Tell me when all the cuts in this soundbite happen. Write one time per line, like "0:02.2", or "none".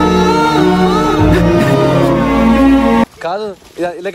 0:03.1